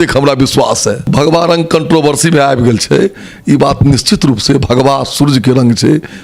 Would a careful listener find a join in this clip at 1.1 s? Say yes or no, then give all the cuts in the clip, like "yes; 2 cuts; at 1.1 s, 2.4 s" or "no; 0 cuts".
yes; 1 cut; at 1.1 s